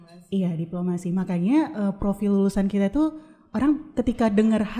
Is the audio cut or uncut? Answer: uncut